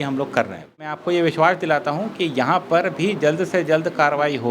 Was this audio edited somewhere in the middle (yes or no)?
yes